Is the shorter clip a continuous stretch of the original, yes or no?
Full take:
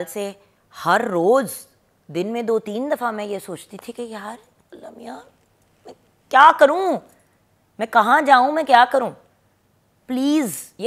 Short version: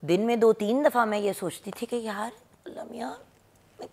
yes